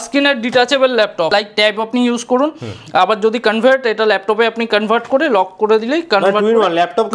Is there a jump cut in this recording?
yes; 1 cut; at 1.3 s

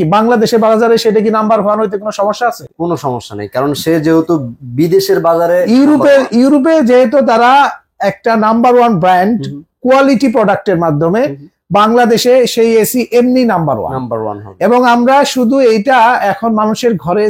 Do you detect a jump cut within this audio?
no; 0 cuts

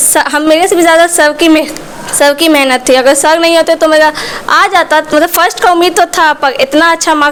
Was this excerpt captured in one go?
yes; 0 cuts

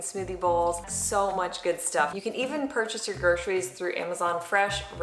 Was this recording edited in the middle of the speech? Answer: yes; 2 cuts; at 0.9 s, 2.1 s

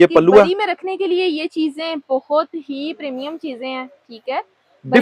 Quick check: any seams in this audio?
no; 0 cuts

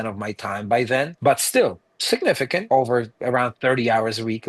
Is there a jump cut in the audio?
yes; 2 cuts; at 1.1 s, 2.7 s

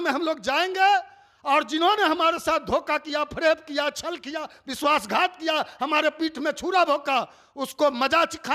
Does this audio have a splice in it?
no; 0 cuts

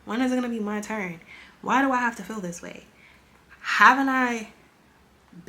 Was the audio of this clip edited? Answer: no; 0 cuts

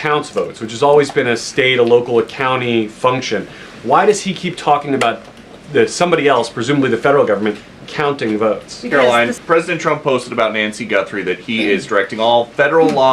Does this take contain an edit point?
yes; 1 cut; at 8.9 s

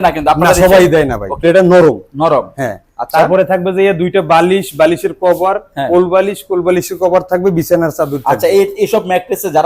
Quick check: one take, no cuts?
no; 1 cut; at 1.4 s

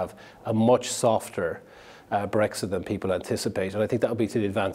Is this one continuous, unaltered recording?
yes; 0 cuts

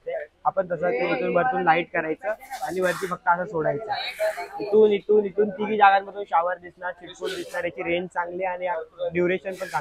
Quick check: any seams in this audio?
no; 0 cuts

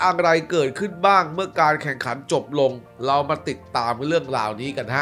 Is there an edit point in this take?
no; 0 cuts

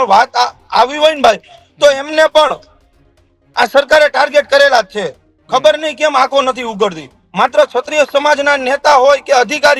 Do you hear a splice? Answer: no; 0 cuts

